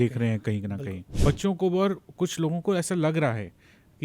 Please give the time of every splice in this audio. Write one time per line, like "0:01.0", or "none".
0:01.0